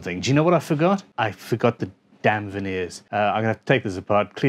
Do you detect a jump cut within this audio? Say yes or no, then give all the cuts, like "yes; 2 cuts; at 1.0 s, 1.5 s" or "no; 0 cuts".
yes; 2 cuts; at 1.1 s, 3.0 s